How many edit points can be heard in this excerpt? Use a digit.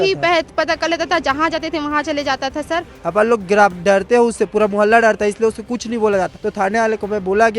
2